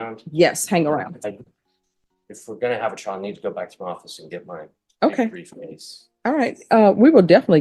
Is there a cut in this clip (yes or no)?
no